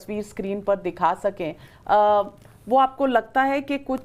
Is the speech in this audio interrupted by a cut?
no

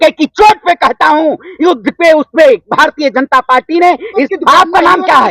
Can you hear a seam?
yes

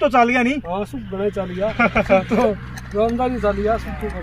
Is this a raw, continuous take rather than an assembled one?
yes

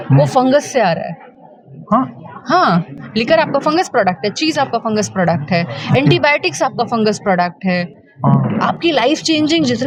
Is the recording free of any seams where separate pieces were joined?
yes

